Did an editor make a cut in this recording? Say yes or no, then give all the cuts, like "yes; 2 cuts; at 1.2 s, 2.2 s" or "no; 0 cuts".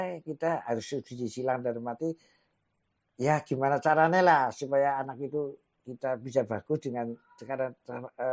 no; 0 cuts